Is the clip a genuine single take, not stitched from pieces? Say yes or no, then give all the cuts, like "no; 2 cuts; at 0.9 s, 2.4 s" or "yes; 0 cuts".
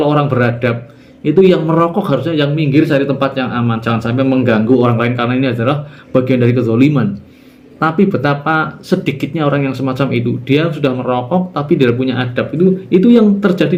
yes; 0 cuts